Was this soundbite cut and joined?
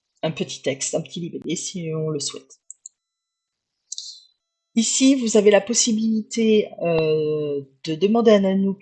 no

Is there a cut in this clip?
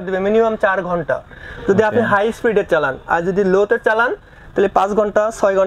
no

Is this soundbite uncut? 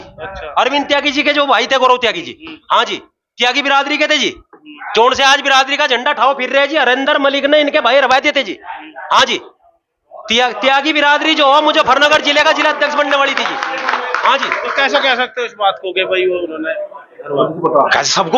yes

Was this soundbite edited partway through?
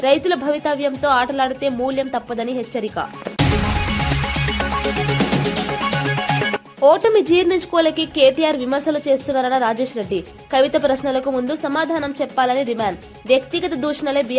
no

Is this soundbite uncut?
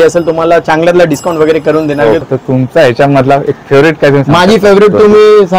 no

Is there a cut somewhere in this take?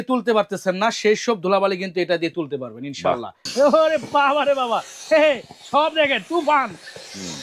yes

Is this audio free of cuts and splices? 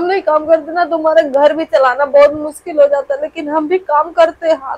yes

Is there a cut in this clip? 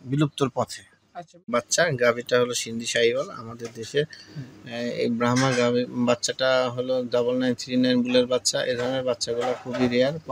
yes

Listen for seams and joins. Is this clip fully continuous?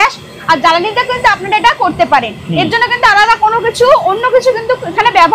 yes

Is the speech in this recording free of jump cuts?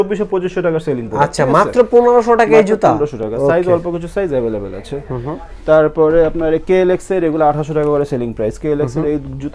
yes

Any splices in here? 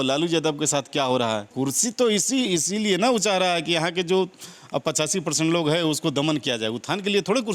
yes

